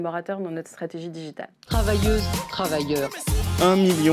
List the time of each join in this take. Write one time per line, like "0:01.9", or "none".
0:01.5